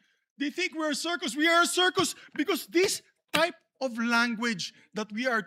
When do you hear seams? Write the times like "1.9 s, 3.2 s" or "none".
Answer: none